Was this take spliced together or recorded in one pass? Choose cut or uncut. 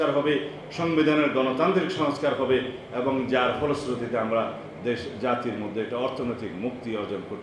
uncut